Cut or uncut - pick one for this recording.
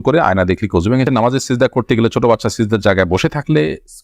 cut